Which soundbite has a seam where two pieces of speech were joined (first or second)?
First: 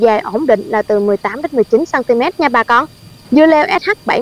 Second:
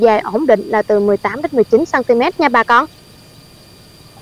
first